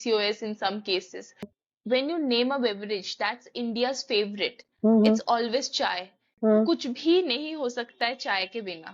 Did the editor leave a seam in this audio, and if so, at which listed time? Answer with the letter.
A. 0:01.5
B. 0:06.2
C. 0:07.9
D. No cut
A